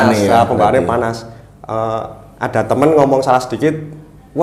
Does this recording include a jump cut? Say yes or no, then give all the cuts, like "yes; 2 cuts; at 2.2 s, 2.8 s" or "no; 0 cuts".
no; 0 cuts